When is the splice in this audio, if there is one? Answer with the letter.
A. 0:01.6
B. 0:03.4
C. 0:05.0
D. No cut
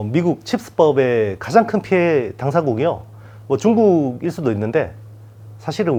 D